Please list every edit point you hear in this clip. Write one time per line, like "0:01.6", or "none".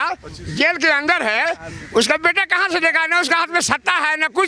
none